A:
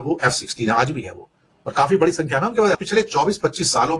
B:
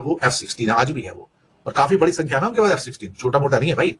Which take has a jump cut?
A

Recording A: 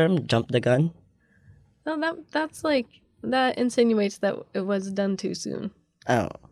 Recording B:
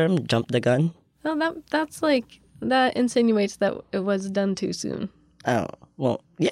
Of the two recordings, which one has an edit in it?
B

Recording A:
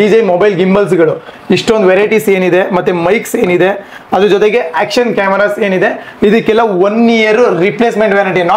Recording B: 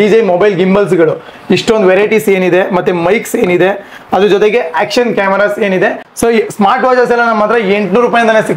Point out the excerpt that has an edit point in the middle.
B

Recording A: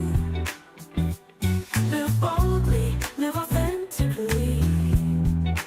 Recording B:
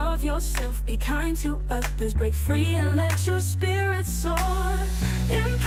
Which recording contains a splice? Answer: A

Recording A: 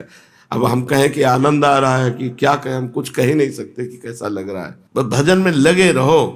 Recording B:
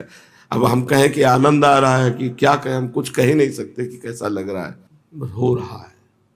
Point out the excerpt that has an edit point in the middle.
A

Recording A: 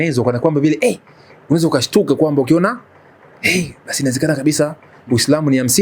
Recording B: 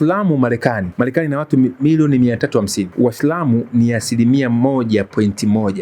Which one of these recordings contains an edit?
B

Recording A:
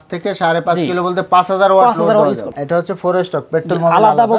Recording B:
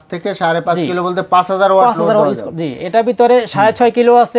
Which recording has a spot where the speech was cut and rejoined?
A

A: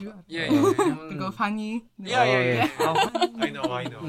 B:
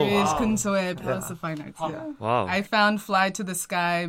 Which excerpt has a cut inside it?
B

